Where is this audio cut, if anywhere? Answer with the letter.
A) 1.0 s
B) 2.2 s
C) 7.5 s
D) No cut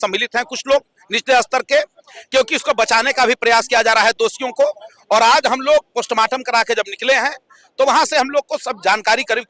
D